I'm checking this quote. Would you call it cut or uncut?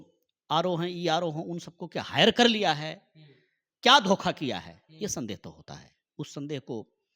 uncut